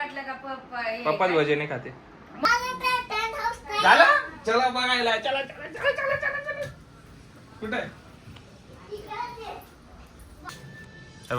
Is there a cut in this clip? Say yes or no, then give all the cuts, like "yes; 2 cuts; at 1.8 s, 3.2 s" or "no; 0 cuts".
yes; 2 cuts; at 2.4 s, 10.5 s